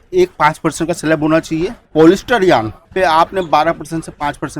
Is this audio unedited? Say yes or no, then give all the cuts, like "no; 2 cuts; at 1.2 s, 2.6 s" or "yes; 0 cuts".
no; 2 cuts; at 1.8 s, 2.8 s